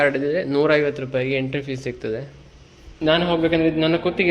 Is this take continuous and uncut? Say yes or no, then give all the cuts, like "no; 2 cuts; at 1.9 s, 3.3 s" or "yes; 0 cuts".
no; 1 cut; at 2.9 s